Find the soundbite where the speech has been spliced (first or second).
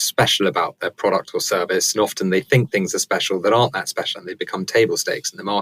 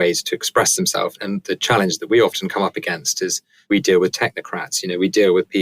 second